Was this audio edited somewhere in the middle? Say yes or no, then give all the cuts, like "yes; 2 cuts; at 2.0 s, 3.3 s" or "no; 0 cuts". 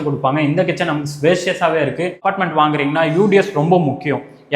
yes; 1 cut; at 2.2 s